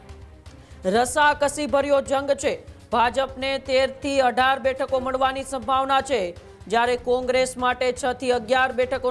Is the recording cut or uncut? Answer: uncut